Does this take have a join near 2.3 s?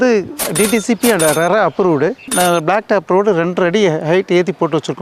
yes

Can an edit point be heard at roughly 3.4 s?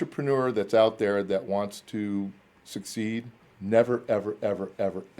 yes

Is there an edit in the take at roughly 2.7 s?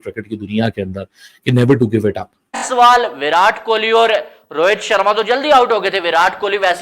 yes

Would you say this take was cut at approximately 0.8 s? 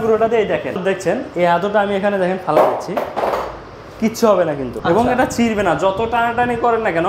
yes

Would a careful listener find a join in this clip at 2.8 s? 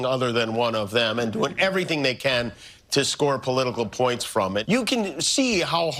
no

